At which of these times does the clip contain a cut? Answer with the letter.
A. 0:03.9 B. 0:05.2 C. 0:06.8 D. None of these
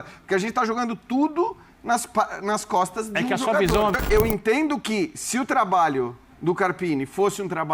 A